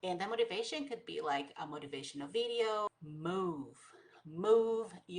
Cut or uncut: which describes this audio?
cut